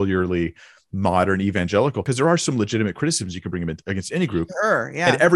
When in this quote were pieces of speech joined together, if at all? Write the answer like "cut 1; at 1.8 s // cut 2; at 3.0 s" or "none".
cut 1; at 2.0 s